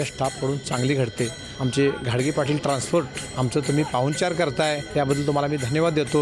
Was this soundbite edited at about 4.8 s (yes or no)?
yes